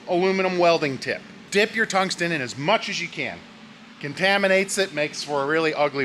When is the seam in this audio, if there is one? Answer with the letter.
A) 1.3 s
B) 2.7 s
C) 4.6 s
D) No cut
A